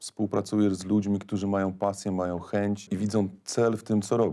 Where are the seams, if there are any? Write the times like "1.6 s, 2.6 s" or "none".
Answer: 2.9 s